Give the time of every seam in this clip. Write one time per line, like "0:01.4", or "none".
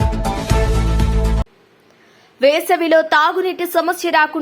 0:01.2